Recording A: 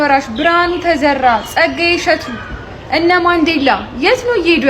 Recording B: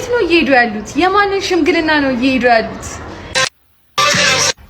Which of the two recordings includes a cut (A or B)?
B